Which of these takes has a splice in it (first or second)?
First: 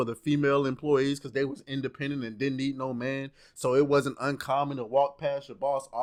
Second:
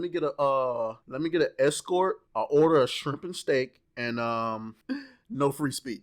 second